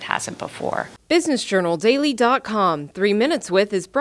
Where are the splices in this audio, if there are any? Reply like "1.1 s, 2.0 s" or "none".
0.9 s